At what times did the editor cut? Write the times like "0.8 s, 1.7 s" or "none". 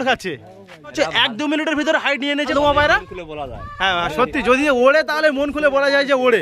0.9 s, 2.5 s